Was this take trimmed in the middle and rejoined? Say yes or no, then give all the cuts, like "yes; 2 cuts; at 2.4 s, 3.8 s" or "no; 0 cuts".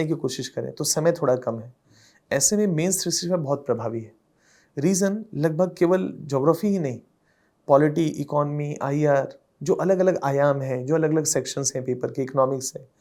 no; 0 cuts